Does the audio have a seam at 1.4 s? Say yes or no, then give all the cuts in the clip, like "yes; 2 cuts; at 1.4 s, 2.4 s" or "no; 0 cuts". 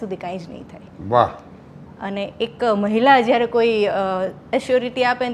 no; 0 cuts